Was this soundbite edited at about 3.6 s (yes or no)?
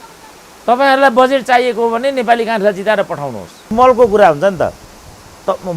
yes